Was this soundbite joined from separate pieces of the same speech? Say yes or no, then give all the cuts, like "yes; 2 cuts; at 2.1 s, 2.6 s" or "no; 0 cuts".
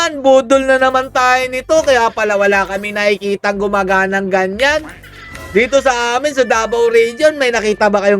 no; 0 cuts